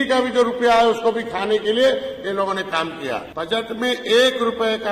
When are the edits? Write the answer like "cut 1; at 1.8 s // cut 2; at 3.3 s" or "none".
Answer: cut 1; at 3.3 s